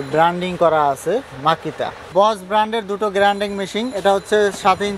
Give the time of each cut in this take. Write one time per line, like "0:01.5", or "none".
0:02.1